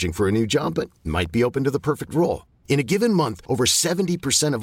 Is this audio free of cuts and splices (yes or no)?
yes